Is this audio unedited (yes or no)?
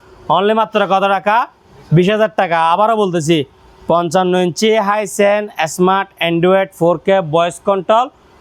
yes